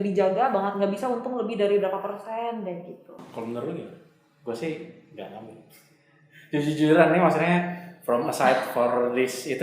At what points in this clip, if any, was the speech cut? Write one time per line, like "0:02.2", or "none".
none